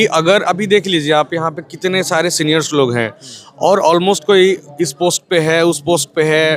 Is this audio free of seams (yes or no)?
yes